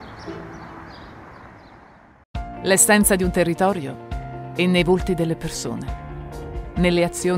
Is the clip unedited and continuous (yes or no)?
no